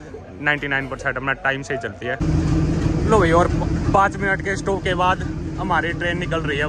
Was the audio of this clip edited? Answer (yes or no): yes